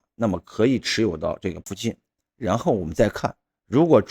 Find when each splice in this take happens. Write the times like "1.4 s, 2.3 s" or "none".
1.6 s